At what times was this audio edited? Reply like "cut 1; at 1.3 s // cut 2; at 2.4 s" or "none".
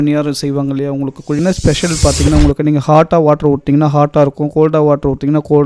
cut 1; at 1.4 s